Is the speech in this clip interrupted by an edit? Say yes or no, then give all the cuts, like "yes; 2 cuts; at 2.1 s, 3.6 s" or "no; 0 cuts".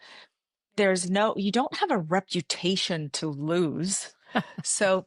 no; 0 cuts